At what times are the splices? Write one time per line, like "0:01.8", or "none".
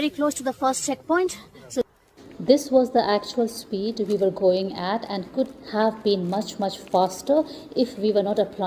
0:01.8